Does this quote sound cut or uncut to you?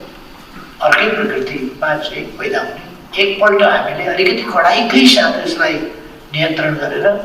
cut